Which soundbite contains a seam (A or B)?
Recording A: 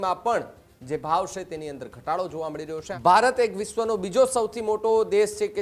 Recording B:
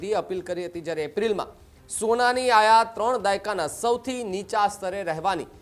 A